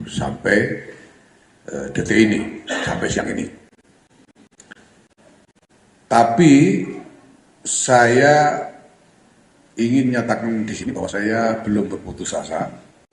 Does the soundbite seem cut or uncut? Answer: uncut